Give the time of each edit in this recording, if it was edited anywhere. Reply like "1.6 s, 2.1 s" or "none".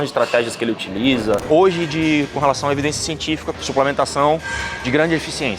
1.4 s